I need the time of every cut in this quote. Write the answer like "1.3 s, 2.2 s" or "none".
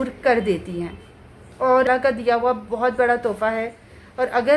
1.9 s